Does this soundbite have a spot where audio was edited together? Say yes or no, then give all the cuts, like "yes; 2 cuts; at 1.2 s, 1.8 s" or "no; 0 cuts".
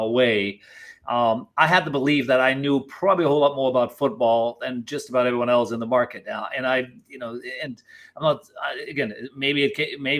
no; 0 cuts